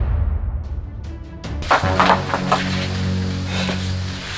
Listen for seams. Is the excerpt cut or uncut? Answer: cut